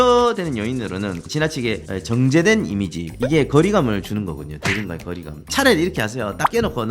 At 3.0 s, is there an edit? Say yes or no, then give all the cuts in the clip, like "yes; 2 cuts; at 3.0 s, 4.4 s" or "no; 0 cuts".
no; 2 cuts; at 1.2 s, 5.4 s